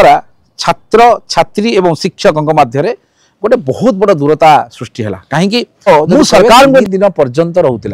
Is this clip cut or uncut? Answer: cut